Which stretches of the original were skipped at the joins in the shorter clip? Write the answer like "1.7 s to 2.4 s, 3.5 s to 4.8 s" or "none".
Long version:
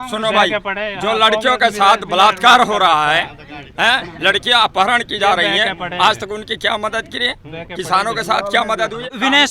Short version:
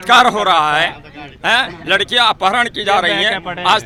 none